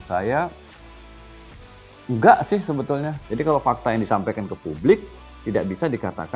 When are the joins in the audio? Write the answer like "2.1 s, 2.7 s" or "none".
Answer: 3.2 s